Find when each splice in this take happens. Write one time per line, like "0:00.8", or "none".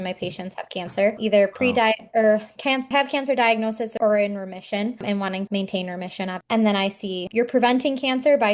0:01.2
0:02.9
0:03.9
0:05.0
0:07.2